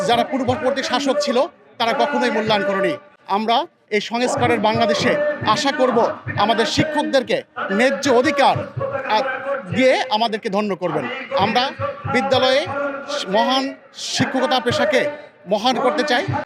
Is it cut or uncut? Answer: uncut